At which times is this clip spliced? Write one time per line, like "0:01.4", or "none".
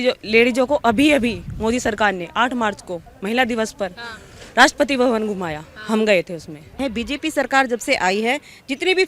0:06.8